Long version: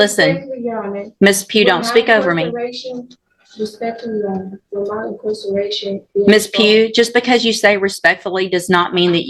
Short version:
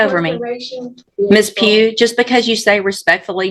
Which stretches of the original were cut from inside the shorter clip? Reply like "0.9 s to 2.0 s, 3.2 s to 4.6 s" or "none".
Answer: 3.1 s to 6.0 s